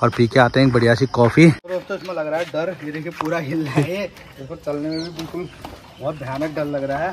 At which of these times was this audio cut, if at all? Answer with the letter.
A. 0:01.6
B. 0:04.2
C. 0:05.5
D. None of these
A